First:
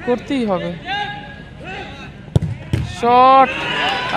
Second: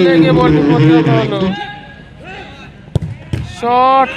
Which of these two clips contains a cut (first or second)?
second